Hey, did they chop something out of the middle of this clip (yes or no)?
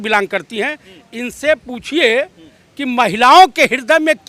no